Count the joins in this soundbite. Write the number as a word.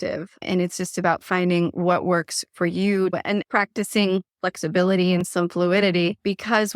one